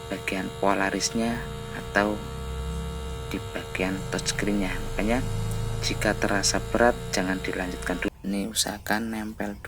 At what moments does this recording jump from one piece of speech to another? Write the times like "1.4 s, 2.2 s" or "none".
8.1 s